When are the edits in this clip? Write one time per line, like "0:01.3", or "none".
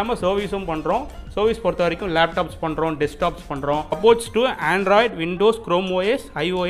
0:04.0